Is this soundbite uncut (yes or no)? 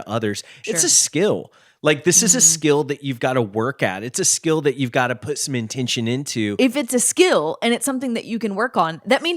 no